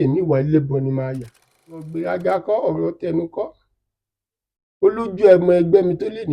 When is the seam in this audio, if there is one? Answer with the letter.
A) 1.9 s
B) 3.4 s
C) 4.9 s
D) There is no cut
A